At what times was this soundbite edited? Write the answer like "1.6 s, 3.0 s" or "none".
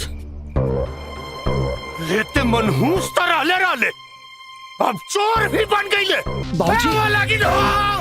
6.4 s